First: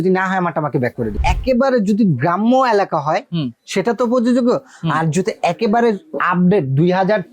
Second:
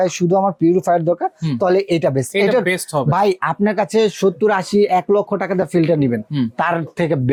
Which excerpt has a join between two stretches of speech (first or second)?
first